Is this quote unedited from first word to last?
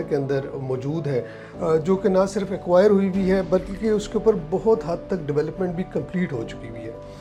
yes; 0 cuts

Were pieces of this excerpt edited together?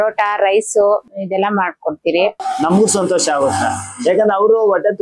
yes; 2 cuts; at 1.2 s, 2.4 s

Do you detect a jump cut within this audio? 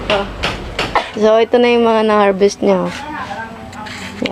yes; 1 cut; at 1.1 s

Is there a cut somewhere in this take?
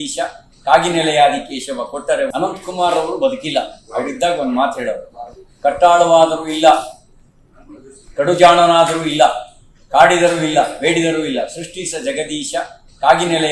yes; 1 cut; at 2.3 s

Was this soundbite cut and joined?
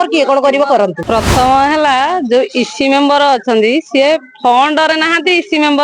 yes; 1 cut; at 1.0 s

